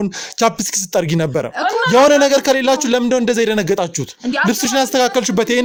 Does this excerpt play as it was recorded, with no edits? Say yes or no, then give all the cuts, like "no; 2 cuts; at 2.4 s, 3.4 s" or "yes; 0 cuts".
yes; 0 cuts